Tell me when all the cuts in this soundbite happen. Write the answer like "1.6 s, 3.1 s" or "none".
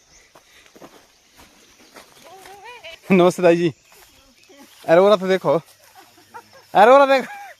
3.0 s

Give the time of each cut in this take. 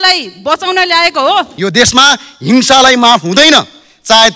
1.5 s

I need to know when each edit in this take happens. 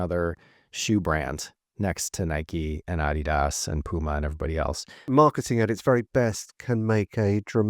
4.9 s

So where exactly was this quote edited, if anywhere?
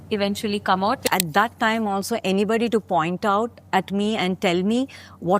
1.0 s

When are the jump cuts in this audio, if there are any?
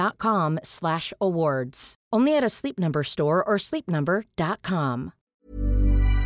5.3 s

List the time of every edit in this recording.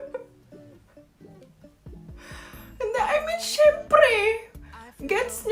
none

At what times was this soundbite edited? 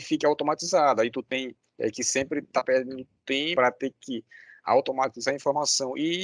3.5 s

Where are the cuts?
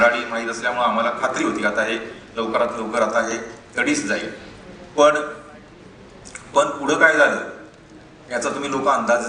none

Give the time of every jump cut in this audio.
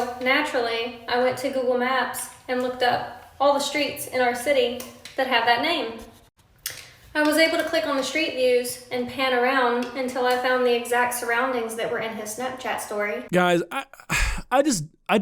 none

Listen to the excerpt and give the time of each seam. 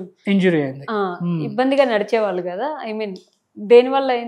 none

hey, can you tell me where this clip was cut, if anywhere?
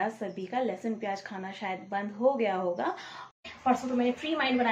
3.4 s

